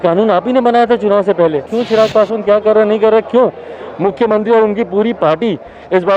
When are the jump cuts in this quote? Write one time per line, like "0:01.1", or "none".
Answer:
0:01.7